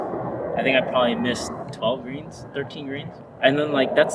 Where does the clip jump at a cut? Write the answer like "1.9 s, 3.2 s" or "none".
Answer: 1.6 s, 3.2 s